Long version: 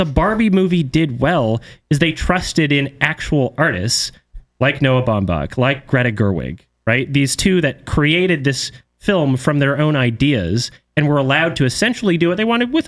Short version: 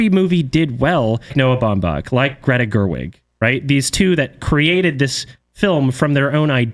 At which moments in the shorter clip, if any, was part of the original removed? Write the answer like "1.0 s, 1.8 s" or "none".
1.3 s